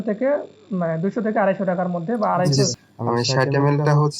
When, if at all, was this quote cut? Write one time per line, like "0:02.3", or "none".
0:02.7